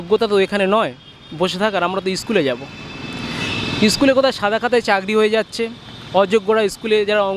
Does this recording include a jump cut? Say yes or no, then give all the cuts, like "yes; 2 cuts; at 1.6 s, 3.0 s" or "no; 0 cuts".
no; 0 cuts